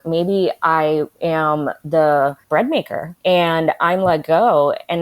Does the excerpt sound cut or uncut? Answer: cut